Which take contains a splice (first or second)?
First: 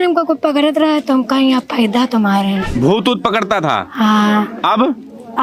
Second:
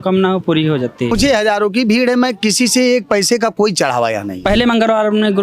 second